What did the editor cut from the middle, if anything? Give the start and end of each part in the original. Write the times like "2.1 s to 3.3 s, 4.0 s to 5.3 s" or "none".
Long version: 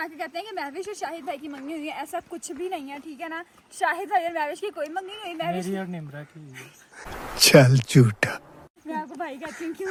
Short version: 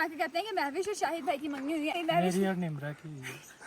1.9 s to 5.2 s